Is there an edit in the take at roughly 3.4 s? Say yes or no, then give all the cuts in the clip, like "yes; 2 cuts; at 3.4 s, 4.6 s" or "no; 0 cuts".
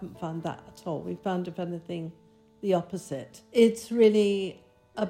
yes; 1 cut; at 3.4 s